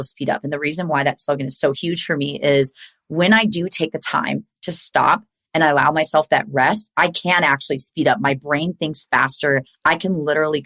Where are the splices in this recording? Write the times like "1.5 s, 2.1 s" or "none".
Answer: 9.7 s